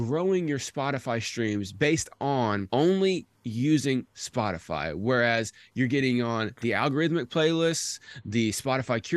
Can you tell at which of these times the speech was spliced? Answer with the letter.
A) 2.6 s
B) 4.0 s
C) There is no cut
A